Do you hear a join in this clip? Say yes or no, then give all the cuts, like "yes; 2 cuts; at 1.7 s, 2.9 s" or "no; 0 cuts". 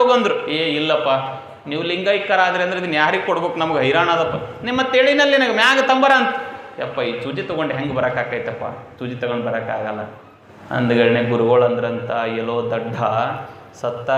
no; 0 cuts